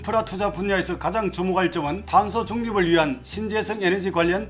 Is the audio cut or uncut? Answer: uncut